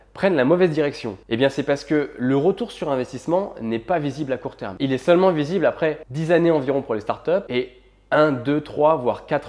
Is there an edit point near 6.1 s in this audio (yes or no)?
yes